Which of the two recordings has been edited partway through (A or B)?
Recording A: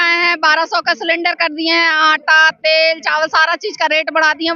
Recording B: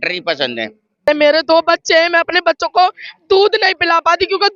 B